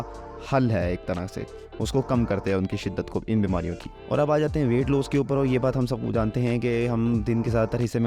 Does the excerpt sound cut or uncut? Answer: uncut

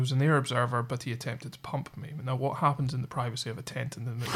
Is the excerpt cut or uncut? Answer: uncut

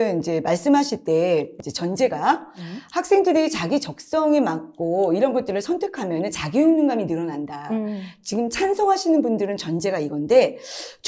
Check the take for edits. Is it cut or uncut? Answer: cut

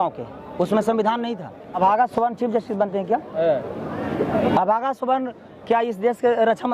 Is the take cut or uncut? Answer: cut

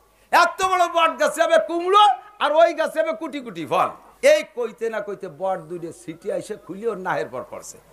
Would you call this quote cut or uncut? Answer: cut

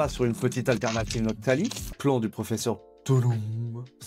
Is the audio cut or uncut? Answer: cut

